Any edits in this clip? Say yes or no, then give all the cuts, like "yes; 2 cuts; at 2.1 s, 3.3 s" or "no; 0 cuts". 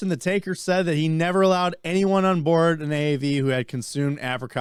no; 0 cuts